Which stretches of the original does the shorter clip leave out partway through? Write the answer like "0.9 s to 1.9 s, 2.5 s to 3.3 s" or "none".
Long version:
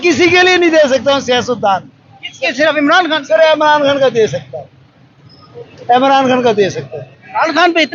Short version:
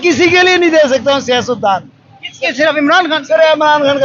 none